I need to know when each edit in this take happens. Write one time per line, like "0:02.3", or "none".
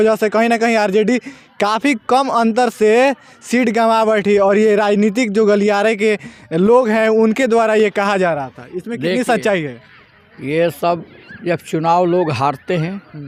none